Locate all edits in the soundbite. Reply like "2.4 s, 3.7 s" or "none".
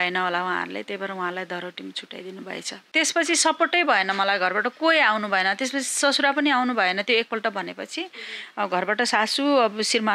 2.8 s